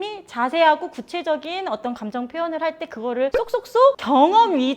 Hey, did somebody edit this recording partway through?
yes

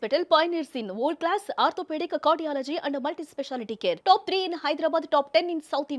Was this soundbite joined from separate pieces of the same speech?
no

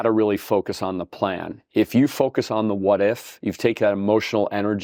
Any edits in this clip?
no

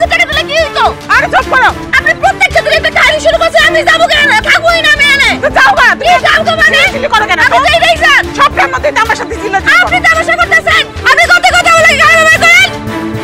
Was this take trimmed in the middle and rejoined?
no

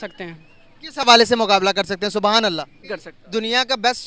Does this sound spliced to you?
yes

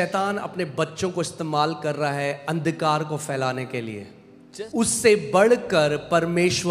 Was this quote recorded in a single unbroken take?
no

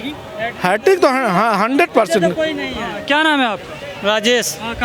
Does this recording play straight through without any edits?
yes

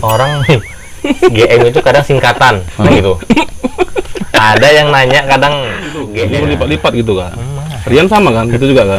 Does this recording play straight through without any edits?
no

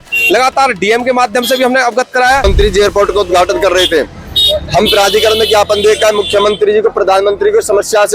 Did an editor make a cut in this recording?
yes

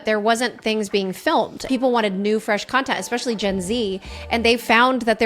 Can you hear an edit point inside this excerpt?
yes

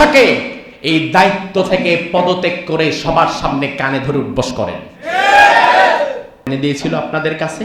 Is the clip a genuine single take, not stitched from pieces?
no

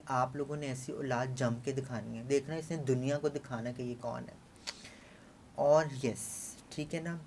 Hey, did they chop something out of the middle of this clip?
no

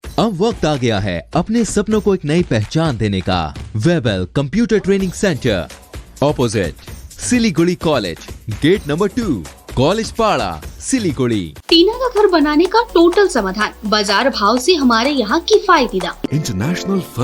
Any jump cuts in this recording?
yes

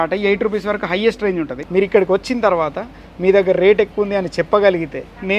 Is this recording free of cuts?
no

